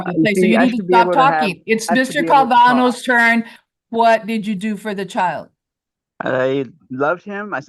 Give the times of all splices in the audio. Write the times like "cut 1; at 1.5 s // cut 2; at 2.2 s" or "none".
cut 1; at 3.6 s